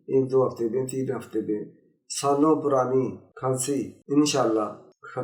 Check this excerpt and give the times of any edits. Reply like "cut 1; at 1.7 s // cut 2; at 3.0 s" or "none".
none